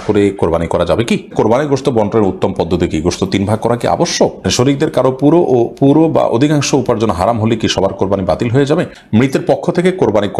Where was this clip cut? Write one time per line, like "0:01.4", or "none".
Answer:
0:01.3
0:04.5
0:09.0

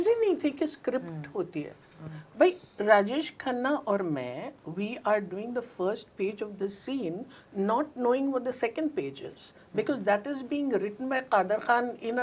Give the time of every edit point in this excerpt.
none

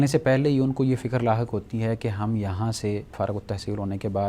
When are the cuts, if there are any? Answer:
0:03.1

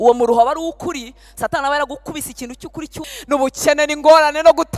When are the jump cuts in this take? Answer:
0:03.1

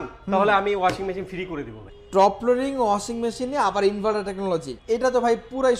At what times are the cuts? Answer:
0:01.8
0:04.7

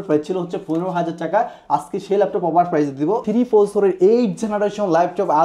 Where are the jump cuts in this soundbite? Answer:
0:03.2

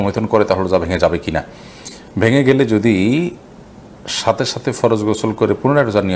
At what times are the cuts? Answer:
none

